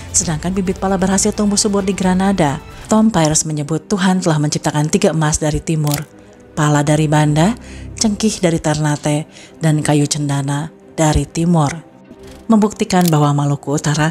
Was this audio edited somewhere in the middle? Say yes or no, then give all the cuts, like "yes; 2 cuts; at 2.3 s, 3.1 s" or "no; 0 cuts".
yes; 2 cuts; at 2.7 s, 12.3 s